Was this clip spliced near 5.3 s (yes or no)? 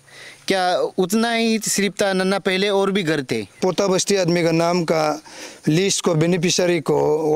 no